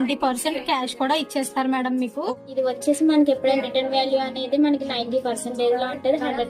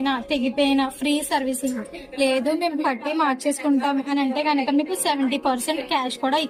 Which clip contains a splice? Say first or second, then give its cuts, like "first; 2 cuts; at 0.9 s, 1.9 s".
first; 1 cut; at 2.3 s